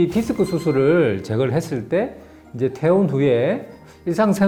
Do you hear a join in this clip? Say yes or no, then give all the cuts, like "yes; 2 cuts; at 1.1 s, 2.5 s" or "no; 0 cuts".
no; 0 cuts